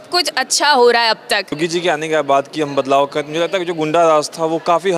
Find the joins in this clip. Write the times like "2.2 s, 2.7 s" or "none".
1.6 s